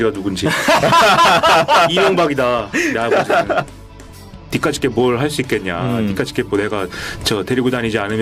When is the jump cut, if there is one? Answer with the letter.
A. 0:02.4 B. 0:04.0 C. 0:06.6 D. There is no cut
B